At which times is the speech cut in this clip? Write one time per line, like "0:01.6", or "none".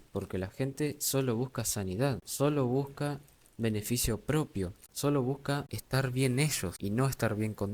0:02.3
0:04.8
0:05.8
0:06.7